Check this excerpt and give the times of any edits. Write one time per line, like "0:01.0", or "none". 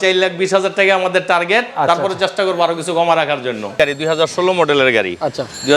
0:03.7